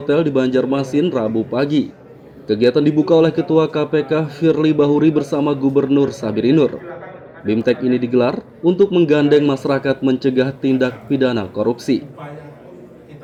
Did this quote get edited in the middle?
no; 0 cuts

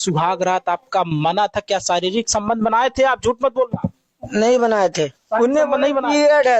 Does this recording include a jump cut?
no; 0 cuts

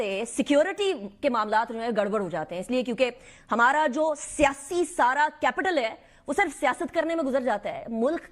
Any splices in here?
no; 0 cuts

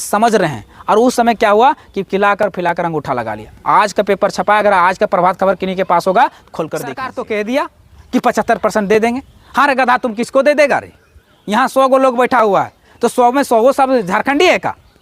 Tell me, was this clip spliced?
yes; 1 cut; at 7.2 s

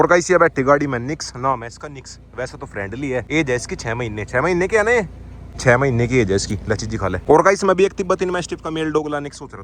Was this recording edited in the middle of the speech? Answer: no; 0 cuts

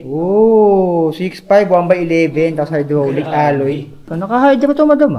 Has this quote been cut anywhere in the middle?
yes; 1 cut; at 4.0 s

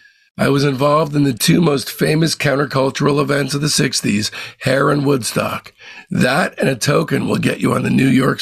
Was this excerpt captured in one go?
yes; 0 cuts

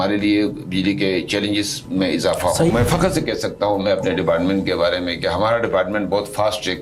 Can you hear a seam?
yes; 1 cut; at 2.7 s

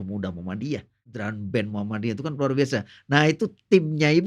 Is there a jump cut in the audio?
yes; 1 cut; at 1.2 s

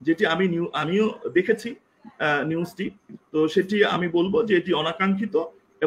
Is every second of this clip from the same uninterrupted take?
yes; 0 cuts

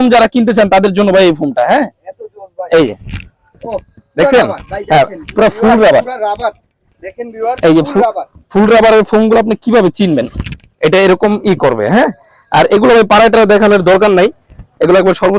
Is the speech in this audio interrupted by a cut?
no; 0 cuts

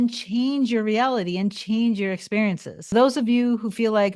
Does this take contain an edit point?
yes; 1 cut; at 2.9 s

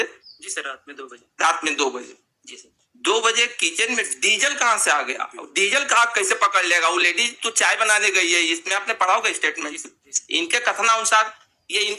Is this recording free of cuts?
yes; 0 cuts

